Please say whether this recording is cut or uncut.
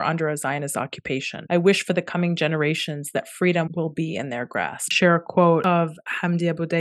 cut